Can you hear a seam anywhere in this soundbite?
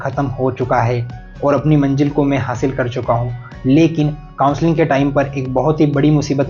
no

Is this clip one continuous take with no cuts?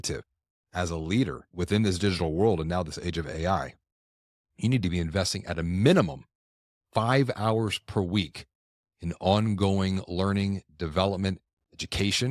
no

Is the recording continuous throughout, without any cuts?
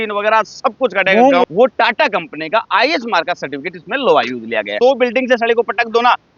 no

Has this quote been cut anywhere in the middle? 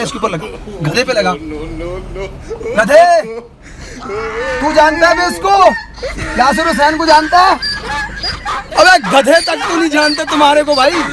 no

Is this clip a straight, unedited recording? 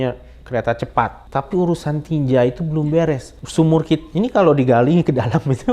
no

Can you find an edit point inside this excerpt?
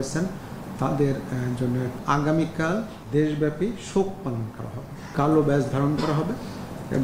yes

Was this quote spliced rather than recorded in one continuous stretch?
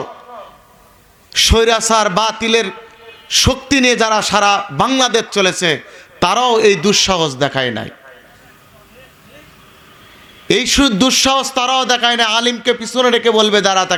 no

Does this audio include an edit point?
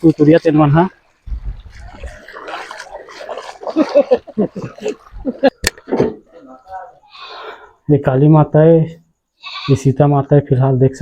yes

